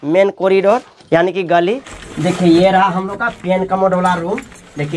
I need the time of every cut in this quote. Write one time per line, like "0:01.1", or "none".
0:00.9
0:02.0